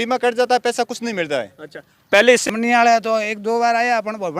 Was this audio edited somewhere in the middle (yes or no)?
yes